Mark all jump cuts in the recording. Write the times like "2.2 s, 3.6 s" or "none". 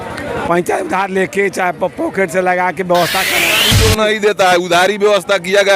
3.6 s